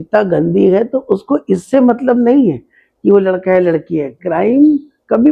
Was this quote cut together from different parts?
no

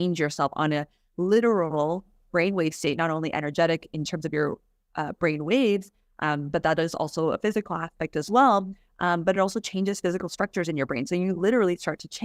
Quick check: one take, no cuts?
yes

